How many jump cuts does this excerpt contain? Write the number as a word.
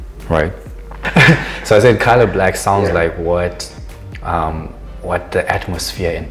one